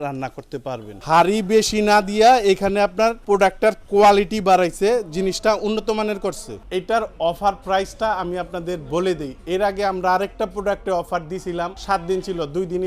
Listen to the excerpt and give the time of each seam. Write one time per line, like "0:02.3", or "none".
0:00.9
0:03.2
0:06.6
0:11.8